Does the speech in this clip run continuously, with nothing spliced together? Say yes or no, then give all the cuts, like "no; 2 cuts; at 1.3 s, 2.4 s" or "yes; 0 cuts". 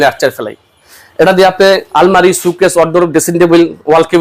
no; 1 cut; at 1.8 s